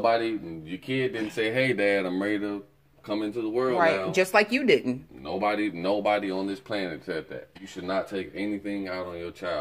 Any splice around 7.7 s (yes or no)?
yes